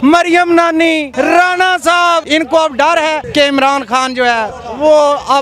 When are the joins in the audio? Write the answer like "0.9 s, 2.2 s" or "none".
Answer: 1.1 s, 2.2 s, 3.2 s